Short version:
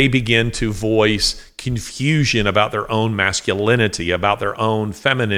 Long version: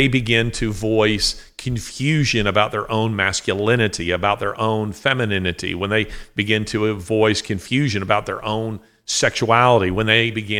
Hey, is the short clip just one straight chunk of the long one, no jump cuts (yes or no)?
yes